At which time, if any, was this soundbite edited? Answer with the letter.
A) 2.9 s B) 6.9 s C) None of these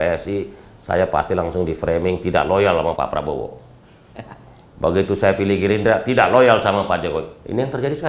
A